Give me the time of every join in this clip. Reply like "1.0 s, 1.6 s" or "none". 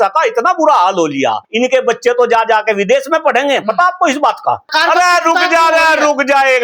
1.4 s, 4.7 s

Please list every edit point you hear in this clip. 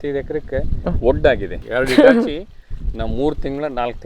1.6 s

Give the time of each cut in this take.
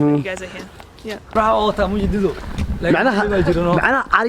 1.4 s

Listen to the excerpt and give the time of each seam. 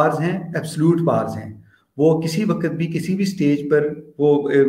none

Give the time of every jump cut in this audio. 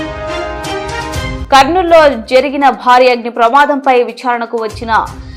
1.1 s

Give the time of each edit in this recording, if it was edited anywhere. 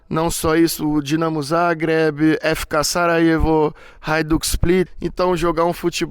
4.9 s

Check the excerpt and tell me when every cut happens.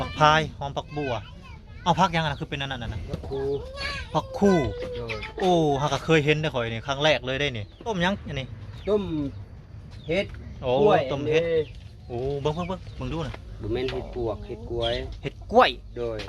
8.0 s

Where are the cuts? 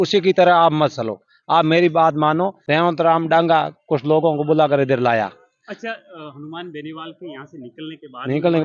2.6 s

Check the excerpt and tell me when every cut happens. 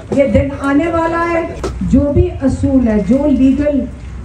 1.6 s

